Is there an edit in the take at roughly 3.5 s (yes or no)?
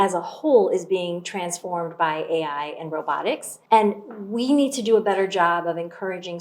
yes